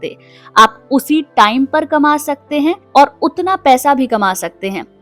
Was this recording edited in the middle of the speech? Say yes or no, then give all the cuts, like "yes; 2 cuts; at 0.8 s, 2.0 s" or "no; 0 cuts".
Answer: yes; 1 cut; at 2.8 s